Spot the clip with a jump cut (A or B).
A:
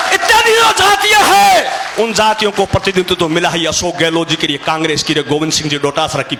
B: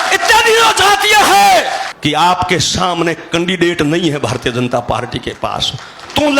B